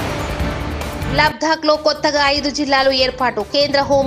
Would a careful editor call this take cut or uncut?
cut